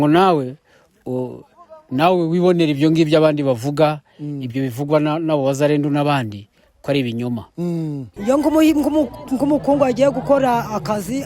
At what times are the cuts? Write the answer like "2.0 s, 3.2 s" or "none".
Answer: 8.1 s